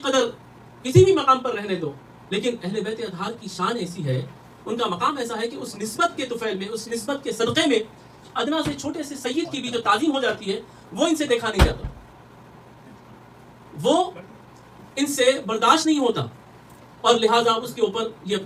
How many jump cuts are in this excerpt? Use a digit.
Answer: 0